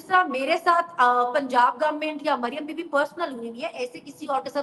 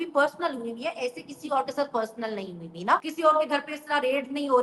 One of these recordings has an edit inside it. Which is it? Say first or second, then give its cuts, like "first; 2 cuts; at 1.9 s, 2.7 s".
second; 1 cut; at 3.1 s